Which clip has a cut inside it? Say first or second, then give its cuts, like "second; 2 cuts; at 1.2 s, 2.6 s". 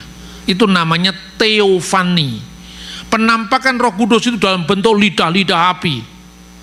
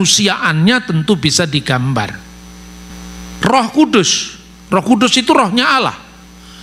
second; 1 cut; at 2.9 s